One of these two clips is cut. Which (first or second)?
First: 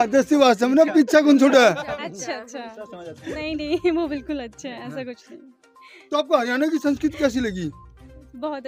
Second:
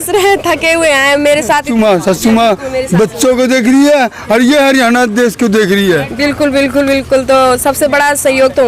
second